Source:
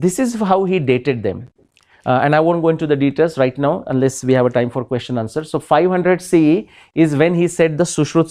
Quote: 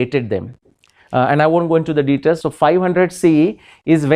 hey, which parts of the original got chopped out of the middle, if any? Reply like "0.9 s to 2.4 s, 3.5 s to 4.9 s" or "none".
3.3 s to 5.5 s

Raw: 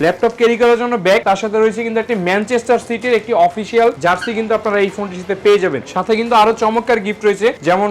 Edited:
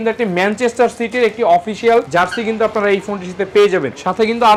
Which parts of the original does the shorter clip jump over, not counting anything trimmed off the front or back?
none

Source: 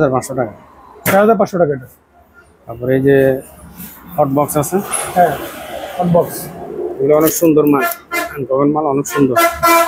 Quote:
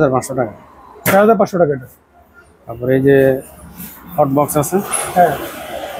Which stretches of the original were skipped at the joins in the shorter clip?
none

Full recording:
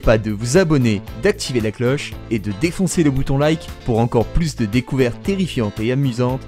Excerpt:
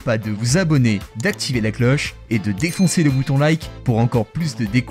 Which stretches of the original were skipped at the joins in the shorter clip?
none

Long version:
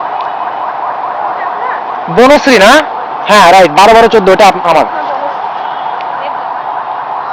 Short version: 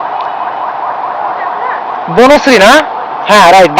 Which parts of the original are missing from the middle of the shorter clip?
none

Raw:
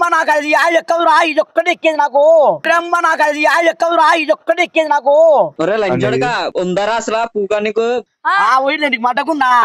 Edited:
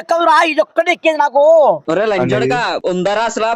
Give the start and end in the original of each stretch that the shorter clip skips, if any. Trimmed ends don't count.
2.6 s to 5.5 s

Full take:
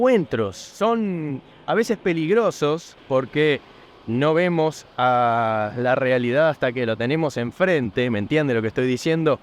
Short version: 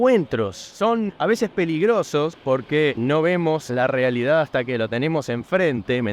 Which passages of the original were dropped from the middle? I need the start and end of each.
1.1 s to 1.6 s, 3.0 s to 3.6 s, 4.8 s to 5.8 s

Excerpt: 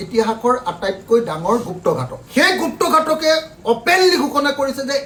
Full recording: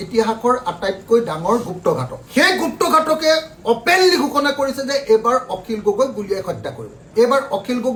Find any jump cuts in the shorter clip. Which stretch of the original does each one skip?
none

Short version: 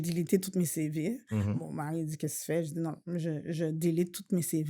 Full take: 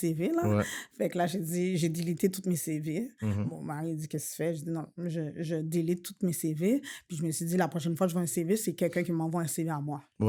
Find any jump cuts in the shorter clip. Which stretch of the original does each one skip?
none

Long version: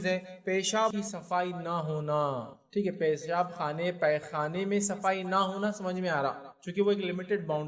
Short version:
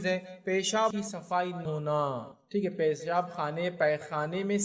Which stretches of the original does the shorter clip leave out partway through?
1.6 s to 1.9 s

